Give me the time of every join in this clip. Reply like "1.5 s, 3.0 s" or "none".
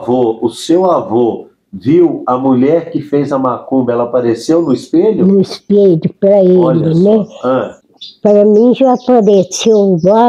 7.8 s